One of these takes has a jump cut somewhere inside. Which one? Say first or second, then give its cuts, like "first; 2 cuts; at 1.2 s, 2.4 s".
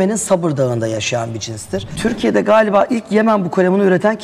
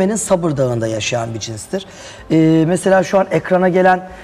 first; 1 cut; at 1.9 s